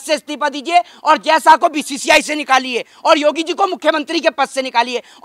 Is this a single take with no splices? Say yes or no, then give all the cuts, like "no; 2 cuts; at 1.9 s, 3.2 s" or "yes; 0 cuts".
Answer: yes; 0 cuts